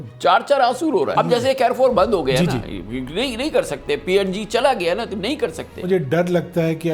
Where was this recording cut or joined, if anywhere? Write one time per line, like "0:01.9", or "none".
0:01.1
0:05.8